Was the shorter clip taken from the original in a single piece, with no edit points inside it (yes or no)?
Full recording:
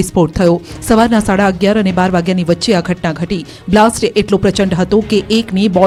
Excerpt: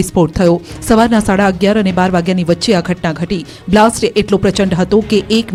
yes